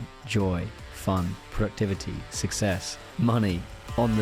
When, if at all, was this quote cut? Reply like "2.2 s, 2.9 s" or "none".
3.0 s